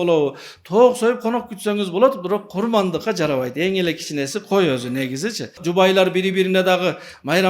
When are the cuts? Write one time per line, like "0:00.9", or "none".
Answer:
0:05.6